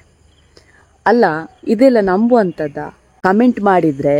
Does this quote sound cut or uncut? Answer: cut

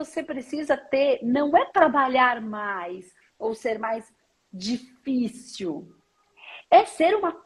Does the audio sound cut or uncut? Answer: uncut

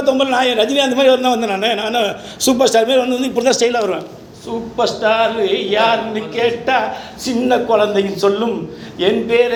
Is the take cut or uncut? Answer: uncut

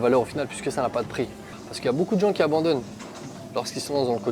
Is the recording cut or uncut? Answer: cut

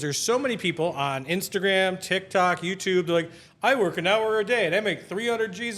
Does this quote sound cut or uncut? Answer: uncut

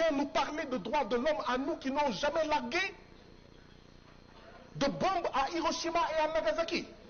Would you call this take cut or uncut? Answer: uncut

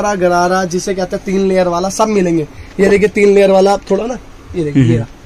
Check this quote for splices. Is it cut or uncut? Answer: uncut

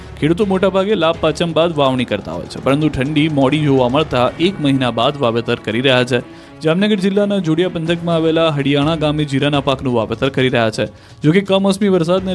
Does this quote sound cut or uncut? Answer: cut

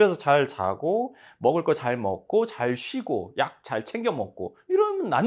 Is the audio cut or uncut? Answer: uncut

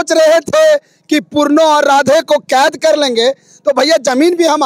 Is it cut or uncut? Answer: uncut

